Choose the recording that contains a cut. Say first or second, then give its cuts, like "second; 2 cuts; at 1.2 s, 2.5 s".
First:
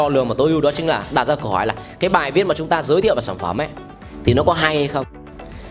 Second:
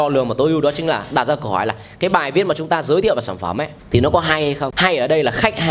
second; 2 cuts; at 3.7 s, 4.7 s